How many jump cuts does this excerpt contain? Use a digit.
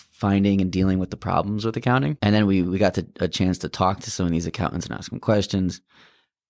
1